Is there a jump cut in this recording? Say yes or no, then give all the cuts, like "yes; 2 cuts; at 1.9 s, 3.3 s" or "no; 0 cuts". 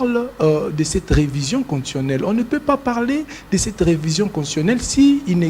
no; 0 cuts